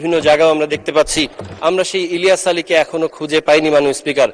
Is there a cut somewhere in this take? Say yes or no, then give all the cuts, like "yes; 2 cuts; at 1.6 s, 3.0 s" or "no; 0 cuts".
yes; 1 cut; at 1.5 s